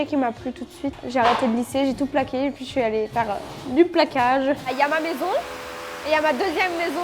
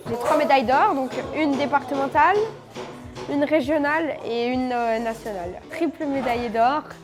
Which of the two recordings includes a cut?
first; 2 cuts; at 1.0 s, 4.6 s

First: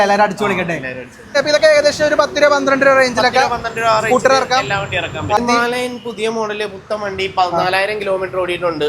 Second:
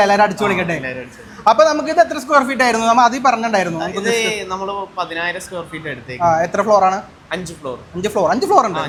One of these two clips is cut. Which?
first; 2 cuts; at 1.3 s, 5.4 s

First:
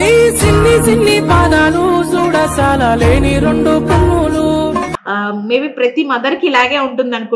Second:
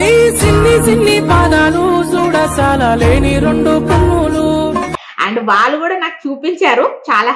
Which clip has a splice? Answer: first; 1 cut; at 5.0 s

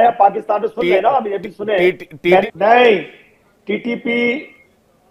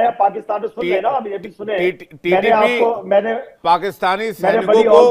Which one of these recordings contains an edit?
first; 1 cut; at 2.4 s

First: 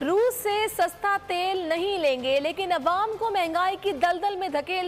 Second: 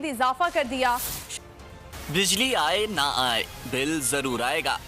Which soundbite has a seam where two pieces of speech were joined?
second; 1 cut; at 1.2 s

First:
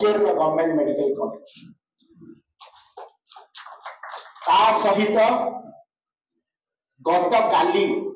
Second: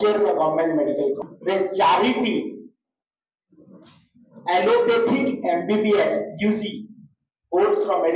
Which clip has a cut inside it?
second; 1 cut; at 1.3 s

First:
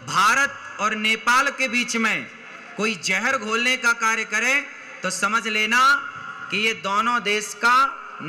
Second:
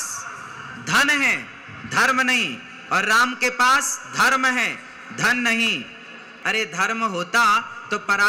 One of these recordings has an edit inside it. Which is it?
second; 1 cut; at 6.3 s

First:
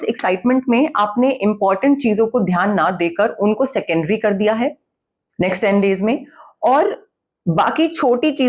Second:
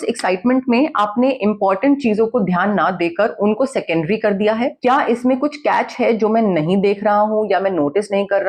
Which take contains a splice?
second; 1 cut; at 4.8 s

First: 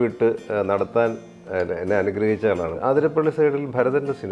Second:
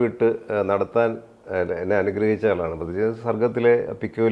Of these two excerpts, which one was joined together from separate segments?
first; 1 cut; at 2.8 s

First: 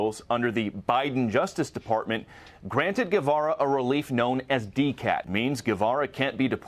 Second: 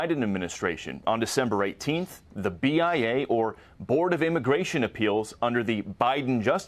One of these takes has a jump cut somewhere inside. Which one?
first; 1 cut; at 5.3 s

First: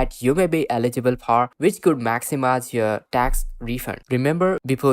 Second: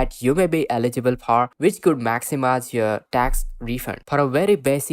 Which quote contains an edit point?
second; 1 cut; at 3.9 s

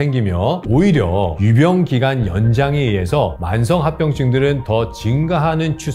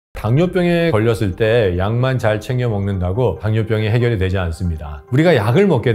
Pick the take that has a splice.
second; 2 cuts; at 0.9 s, 5.0 s

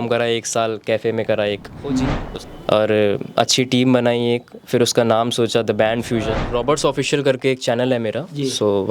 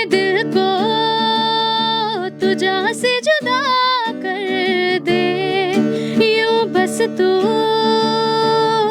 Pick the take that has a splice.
first; 2 cuts; at 2.2 s, 6.4 s

